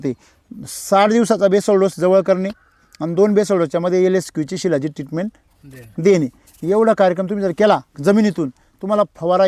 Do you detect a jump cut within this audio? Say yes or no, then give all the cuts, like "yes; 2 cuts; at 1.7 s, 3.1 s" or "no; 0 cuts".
no; 0 cuts